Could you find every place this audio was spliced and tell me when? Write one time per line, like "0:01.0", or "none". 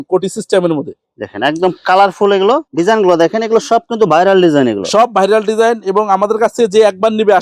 none